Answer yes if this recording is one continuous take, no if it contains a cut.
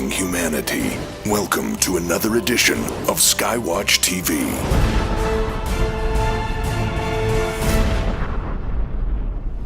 no